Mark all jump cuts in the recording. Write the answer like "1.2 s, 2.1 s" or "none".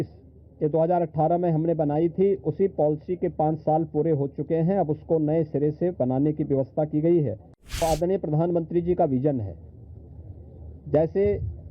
7.8 s